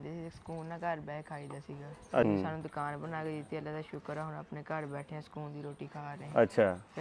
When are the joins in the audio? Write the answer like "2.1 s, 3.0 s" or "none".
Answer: 2.2 s, 6.2 s